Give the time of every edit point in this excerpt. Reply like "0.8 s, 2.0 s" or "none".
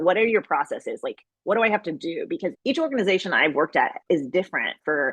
2.6 s